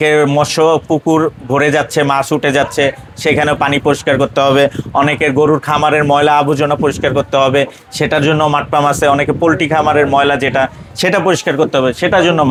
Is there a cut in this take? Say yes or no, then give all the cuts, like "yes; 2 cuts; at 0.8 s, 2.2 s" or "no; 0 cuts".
no; 0 cuts